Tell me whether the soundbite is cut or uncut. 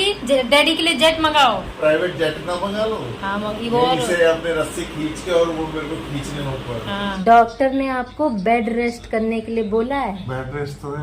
cut